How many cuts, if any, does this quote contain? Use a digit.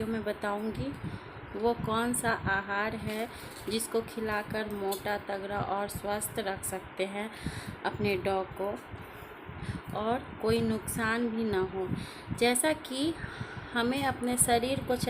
1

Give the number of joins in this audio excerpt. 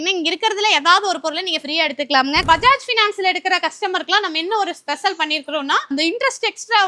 2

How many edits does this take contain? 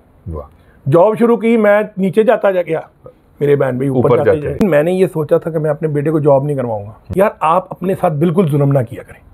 2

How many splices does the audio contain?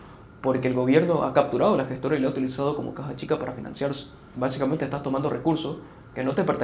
1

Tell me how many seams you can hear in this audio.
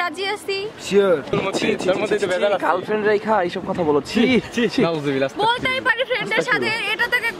1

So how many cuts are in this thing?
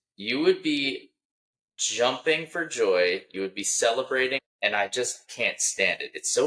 2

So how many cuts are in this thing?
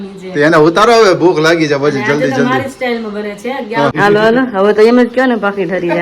1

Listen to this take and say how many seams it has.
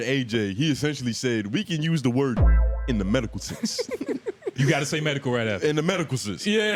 0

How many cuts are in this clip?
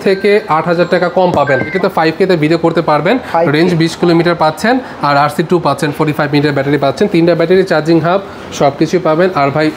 1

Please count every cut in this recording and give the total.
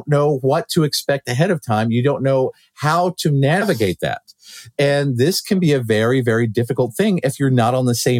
0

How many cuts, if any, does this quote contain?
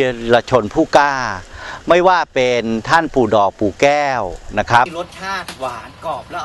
1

